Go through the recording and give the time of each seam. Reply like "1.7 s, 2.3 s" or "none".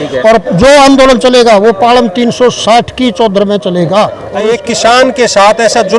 4.2 s